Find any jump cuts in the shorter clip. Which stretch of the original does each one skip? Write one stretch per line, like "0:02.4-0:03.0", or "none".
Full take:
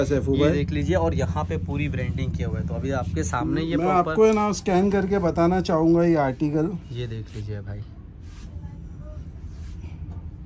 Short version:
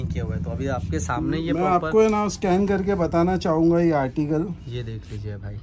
none